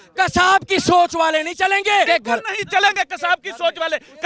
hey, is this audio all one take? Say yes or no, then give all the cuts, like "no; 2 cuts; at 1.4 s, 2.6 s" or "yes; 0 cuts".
no; 1 cut; at 2.1 s